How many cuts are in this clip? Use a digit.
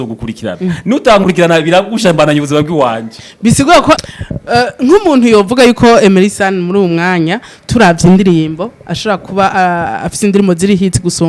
1